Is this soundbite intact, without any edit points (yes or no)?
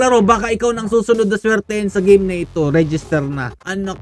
yes